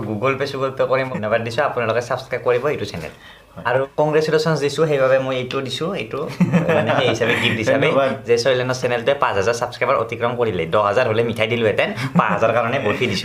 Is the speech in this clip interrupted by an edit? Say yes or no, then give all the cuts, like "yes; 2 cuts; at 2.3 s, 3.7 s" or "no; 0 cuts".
yes; 2 cuts; at 1.1 s, 3.8 s